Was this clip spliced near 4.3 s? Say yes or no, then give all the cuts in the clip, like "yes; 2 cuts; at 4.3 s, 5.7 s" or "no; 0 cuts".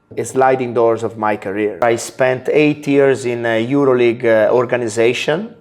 no; 1 cut; at 1.8 s